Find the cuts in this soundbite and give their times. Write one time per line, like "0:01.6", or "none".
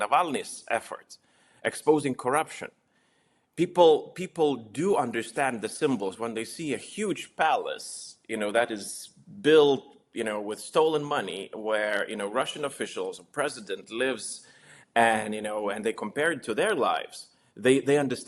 none